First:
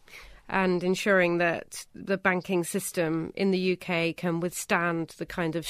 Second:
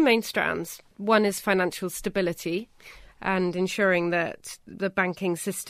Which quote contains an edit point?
second; 1 cut; at 0.9 s

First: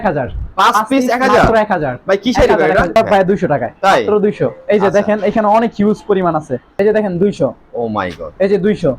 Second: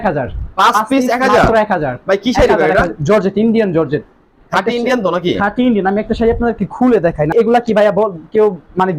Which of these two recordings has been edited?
first; 2 cuts; at 3.0 s, 6.7 s

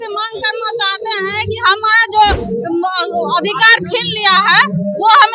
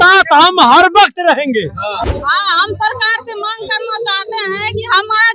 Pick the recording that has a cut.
second; 1 cut; at 2.1 s

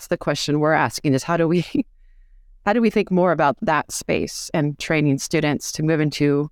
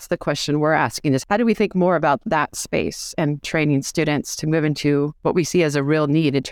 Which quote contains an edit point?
second; 2 cuts; at 1.2 s, 5.1 s

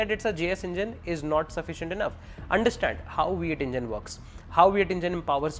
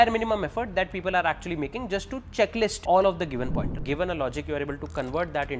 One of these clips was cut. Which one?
second; 2 cuts; at 2.8 s, 3.7 s

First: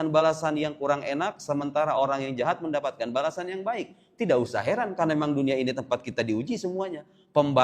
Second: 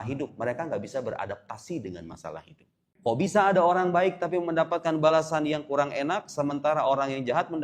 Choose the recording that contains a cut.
second; 1 cut; at 2.8 s

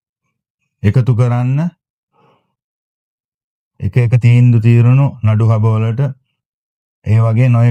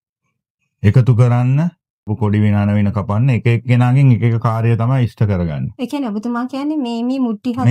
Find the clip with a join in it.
second; 1 cut; at 2.1 s

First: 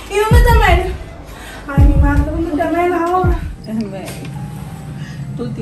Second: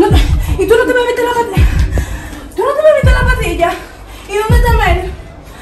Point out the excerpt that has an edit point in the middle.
first; 1 cut; at 3.4 s

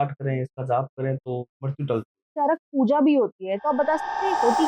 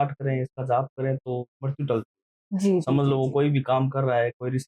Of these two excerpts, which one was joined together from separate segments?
first; 1 cut; at 2.3 s

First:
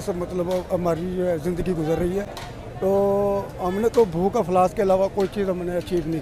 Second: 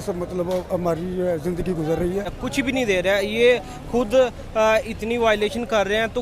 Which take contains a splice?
second; 1 cut; at 2.4 s

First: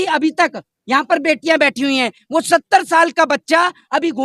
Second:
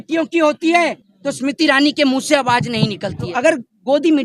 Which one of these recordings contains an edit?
second; 1 cut; at 3.3 s

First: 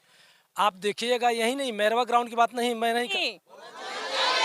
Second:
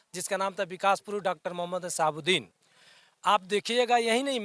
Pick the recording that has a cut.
first; 1 cut; at 3.1 s

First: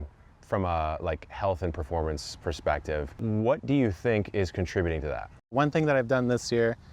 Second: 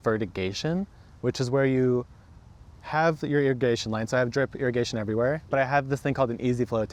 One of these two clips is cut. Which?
first; 2 cuts; at 3.1 s, 5.5 s

